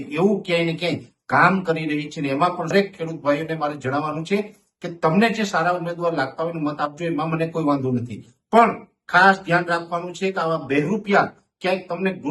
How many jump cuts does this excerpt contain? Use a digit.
1